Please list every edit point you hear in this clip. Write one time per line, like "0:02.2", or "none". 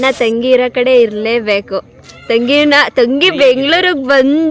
none